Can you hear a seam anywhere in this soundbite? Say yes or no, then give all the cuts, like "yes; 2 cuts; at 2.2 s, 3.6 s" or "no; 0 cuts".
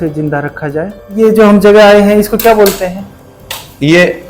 yes; 1 cut; at 1.0 s